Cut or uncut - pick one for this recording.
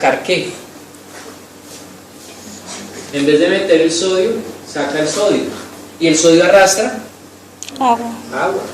cut